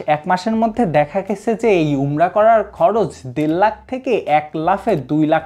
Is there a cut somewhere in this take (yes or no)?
no